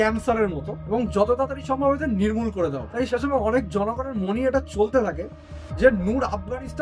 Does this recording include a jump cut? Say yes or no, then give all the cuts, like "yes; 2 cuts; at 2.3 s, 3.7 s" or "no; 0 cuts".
no; 0 cuts